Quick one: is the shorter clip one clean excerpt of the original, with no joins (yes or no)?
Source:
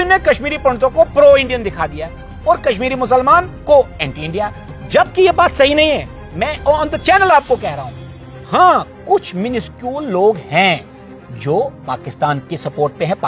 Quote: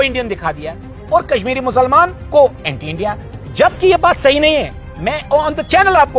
yes